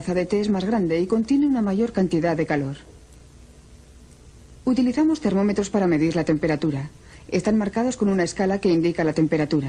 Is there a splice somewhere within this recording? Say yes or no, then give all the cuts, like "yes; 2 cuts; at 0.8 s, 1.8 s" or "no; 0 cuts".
no; 0 cuts